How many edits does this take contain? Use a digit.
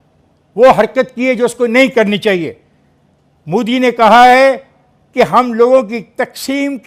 0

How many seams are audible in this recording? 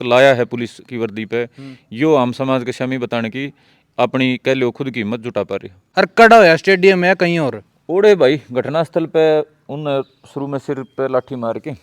1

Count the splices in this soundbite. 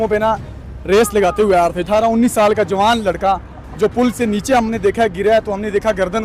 1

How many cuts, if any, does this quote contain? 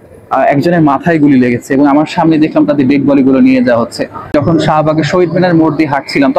1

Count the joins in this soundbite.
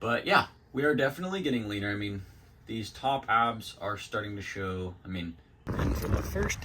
1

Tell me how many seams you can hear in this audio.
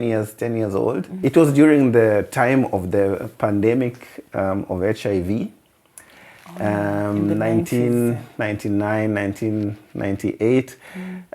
1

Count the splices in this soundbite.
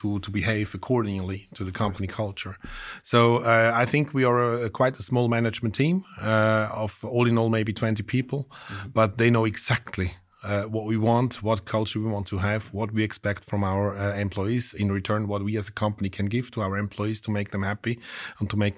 0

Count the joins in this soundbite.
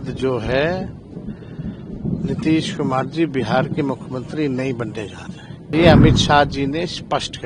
1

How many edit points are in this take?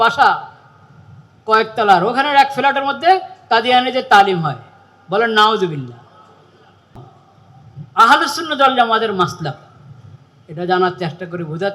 1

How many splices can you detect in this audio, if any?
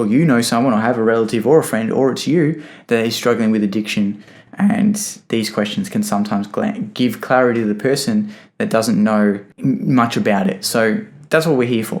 1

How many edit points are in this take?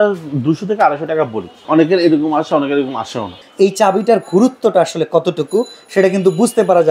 2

